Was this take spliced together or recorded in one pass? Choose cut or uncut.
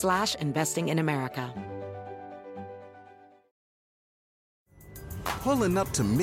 cut